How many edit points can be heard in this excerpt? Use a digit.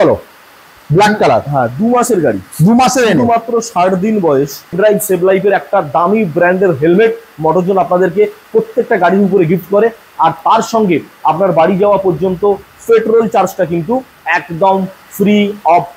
1